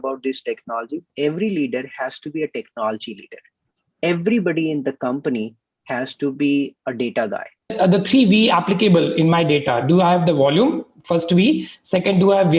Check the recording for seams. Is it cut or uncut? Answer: cut